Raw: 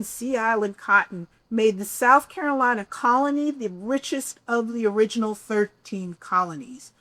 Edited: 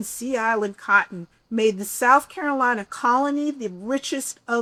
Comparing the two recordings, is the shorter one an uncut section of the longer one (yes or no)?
yes